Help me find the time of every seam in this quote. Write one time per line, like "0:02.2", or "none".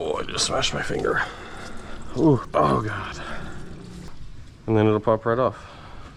0:02.5
0:04.1